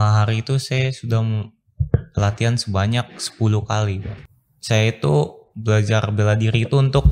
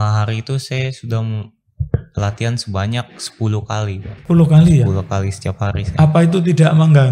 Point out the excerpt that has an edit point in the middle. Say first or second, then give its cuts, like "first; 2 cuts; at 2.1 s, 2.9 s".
first; 1 cut; at 4.1 s